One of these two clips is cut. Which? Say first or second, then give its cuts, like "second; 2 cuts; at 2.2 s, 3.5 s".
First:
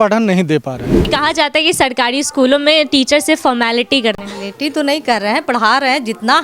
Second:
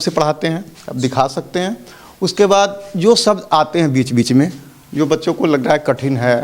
first; 2 cuts; at 1.1 s, 4.2 s